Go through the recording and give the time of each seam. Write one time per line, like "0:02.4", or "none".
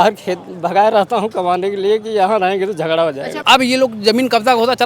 0:03.3